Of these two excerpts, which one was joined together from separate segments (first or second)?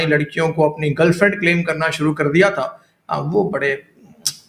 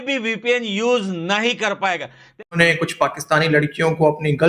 second